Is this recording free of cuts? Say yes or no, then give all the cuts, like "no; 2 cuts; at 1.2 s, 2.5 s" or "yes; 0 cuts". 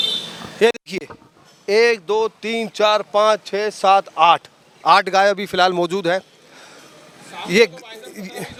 yes; 0 cuts